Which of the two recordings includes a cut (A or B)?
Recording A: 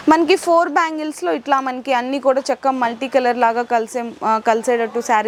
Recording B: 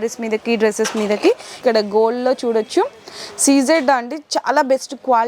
B